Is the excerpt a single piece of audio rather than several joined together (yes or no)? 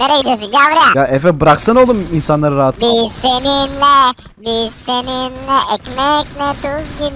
no